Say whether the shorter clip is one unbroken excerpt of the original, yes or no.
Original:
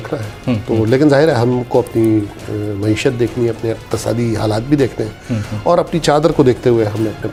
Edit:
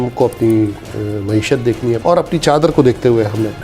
no